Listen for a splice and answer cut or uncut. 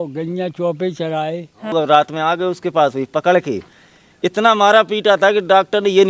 cut